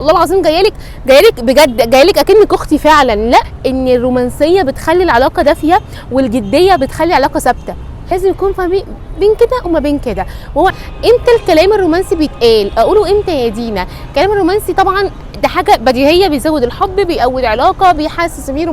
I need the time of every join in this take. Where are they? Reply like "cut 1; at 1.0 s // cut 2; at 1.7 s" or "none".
cut 1; at 3.5 s // cut 2; at 8.0 s // cut 3; at 10.7 s